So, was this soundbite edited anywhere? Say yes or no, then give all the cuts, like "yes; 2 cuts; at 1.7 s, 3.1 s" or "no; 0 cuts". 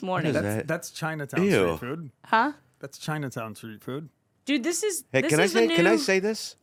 no; 0 cuts